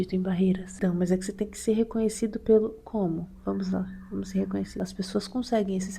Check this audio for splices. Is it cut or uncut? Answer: cut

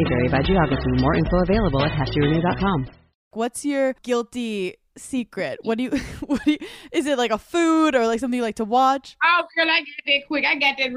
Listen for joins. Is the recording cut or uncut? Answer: cut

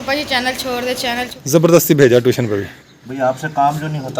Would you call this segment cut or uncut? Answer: cut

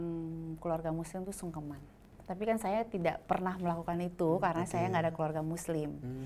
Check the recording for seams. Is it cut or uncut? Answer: cut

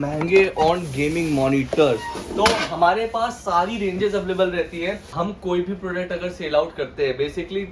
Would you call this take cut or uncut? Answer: cut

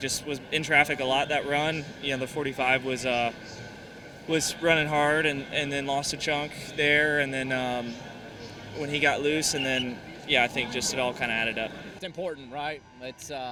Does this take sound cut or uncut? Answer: uncut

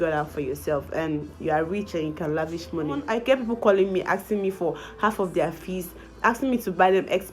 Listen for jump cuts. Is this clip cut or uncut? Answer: cut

